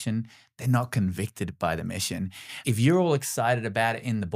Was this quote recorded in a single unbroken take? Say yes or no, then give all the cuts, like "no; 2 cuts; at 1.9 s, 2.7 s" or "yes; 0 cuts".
no; 1 cut; at 2.6 s